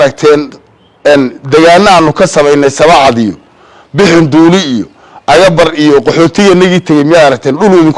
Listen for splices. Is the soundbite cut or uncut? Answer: uncut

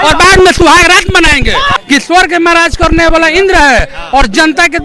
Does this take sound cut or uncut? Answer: cut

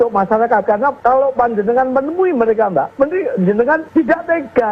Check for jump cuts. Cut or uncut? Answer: cut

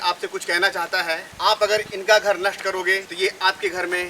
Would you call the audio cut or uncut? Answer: cut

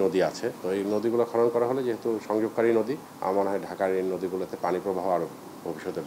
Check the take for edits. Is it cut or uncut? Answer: uncut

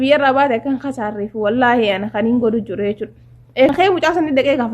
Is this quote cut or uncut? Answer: cut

